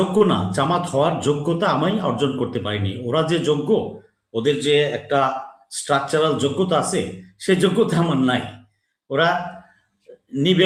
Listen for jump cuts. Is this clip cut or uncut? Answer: uncut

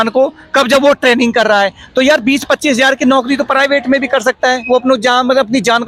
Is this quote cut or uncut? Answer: uncut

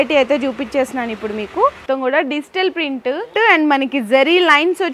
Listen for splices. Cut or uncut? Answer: cut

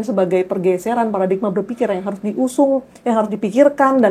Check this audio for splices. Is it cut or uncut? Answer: uncut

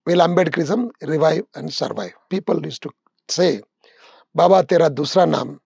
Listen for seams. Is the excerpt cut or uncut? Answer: cut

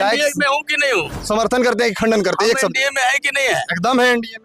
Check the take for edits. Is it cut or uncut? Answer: uncut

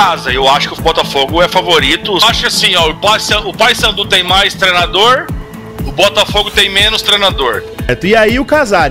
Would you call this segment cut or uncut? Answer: cut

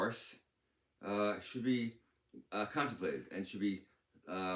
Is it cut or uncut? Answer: uncut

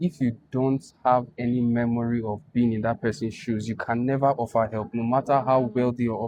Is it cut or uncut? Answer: uncut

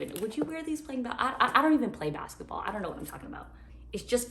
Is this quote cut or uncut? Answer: uncut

